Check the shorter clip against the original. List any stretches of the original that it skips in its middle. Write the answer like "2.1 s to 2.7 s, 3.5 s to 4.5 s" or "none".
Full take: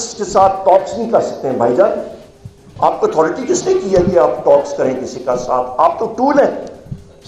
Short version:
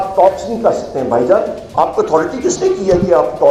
2.1 s to 2.6 s